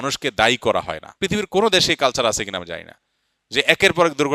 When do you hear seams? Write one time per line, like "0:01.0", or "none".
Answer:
0:01.0